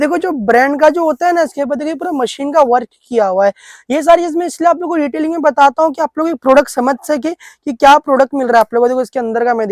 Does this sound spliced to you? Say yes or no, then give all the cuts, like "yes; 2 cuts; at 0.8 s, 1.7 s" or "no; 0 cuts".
no; 0 cuts